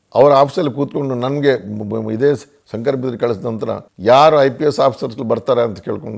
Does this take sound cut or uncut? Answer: uncut